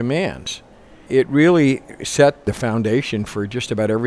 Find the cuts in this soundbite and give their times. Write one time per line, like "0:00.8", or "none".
0:01.0
0:02.4